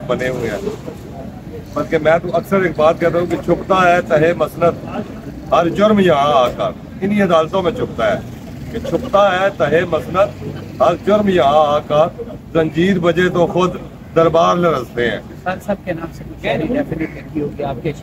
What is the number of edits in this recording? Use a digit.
1